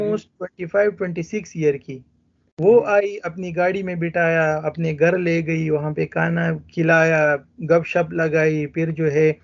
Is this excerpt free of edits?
yes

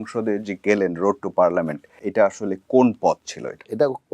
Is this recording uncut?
no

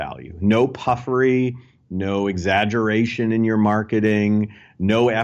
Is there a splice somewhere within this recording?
no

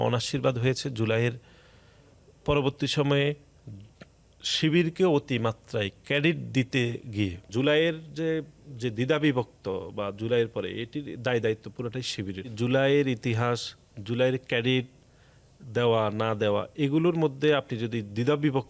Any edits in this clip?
yes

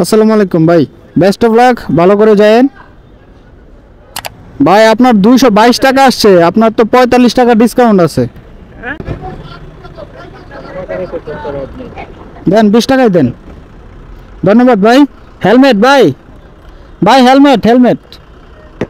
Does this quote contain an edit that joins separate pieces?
yes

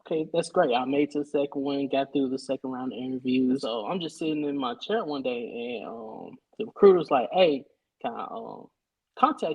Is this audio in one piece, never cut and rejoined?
no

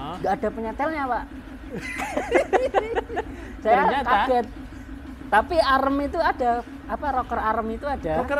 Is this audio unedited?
yes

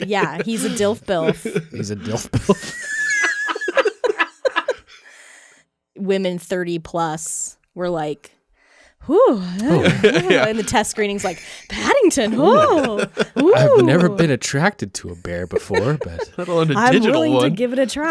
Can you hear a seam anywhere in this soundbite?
yes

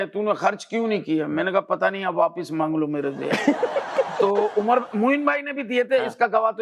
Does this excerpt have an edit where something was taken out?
no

